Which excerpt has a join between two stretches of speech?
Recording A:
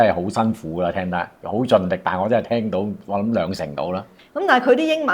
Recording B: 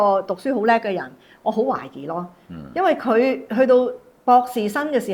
A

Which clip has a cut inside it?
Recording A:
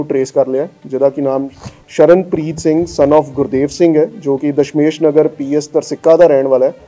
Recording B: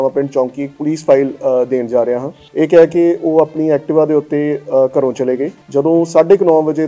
B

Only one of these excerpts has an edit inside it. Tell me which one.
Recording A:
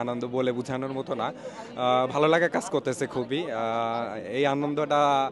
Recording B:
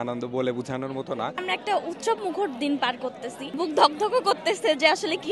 B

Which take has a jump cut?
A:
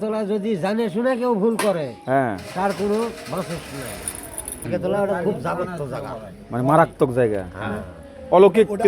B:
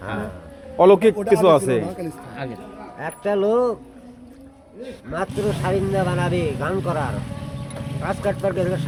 A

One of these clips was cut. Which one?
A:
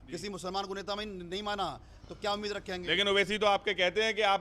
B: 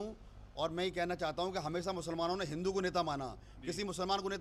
A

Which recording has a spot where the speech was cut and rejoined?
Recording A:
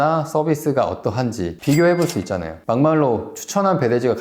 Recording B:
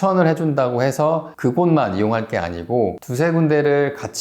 B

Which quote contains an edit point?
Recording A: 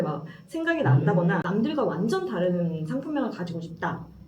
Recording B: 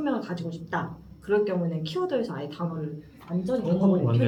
A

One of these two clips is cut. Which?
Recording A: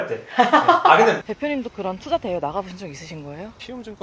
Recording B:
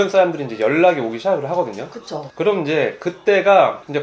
A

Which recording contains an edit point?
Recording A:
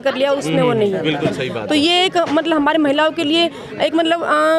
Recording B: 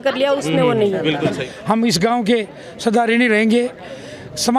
B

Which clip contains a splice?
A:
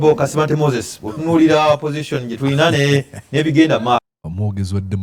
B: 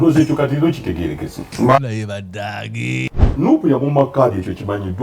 B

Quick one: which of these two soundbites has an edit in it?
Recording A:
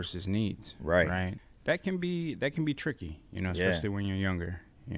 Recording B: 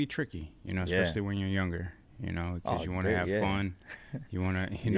A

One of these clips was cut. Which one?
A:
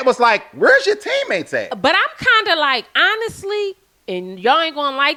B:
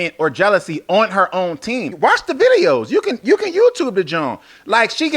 B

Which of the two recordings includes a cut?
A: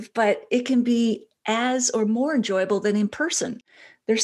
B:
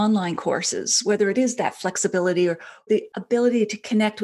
B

